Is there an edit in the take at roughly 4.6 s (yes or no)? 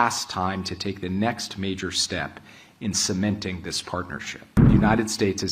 yes